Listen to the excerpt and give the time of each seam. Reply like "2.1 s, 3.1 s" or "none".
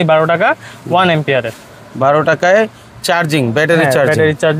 none